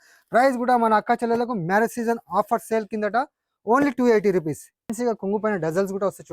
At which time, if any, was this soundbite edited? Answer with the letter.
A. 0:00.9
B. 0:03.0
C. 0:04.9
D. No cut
C